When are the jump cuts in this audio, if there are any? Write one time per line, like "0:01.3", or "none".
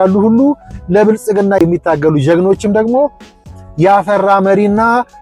0:01.6